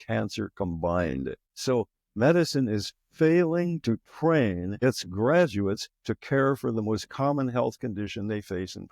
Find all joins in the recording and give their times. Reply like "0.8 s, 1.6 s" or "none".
1.5 s, 4.7 s